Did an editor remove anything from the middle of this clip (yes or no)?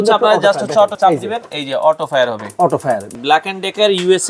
yes